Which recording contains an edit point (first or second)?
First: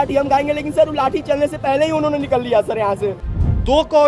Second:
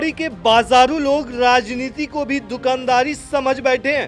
first